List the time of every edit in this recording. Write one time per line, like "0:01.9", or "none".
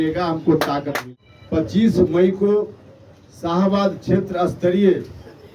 0:00.9